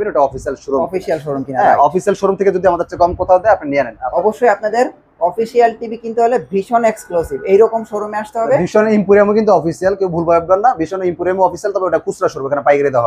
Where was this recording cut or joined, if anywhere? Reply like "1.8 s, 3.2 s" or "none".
4.0 s